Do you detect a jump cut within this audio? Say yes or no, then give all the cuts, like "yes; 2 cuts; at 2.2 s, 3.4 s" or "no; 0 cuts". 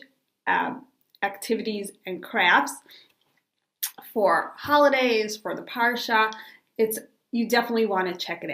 yes; 1 cut; at 4.5 s